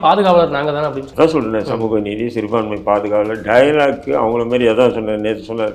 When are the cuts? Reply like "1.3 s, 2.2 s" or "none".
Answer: 1.0 s